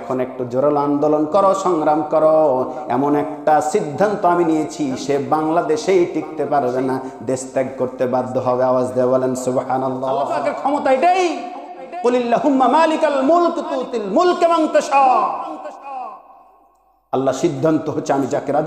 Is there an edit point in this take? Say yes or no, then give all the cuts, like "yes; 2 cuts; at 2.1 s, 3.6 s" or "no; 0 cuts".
yes; 1 cut; at 10.3 s